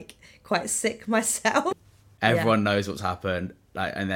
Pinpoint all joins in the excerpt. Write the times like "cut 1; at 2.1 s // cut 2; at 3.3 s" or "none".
cut 1; at 1.7 s